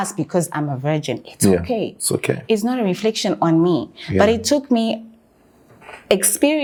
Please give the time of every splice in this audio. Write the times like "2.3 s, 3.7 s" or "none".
none